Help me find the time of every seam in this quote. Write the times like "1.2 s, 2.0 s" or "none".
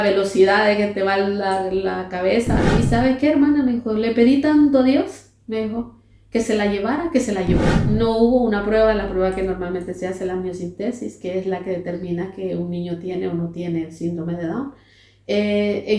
2.7 s, 7.7 s